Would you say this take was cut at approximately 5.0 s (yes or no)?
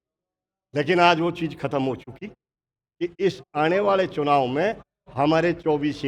no